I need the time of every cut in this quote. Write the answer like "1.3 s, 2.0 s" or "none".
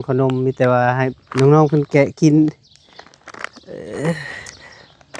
none

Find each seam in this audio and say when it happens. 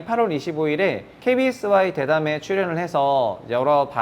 1.1 s

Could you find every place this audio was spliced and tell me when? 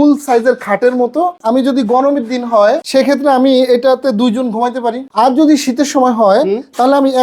1.4 s, 2.8 s, 5.1 s

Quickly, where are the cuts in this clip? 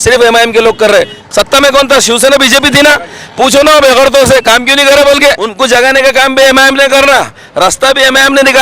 1.2 s, 5.5 s

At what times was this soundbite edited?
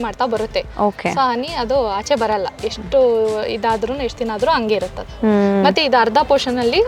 none

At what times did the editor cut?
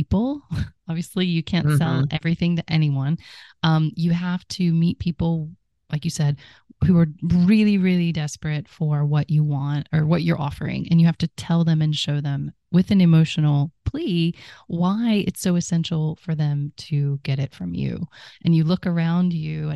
6.9 s, 18.3 s

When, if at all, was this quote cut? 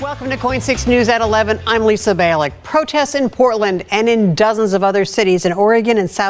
4.2 s

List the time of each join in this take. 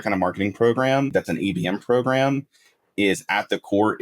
1.0 s

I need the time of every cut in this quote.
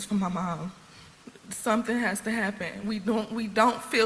none

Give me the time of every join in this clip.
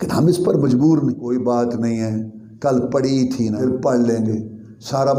1.2 s, 3.6 s

